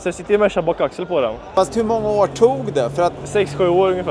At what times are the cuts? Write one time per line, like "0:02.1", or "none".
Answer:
0:01.5
0:03.2